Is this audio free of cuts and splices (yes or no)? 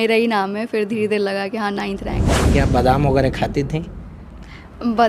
no